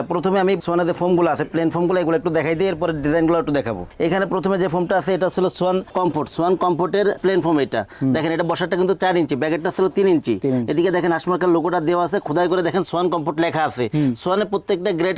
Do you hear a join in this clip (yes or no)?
no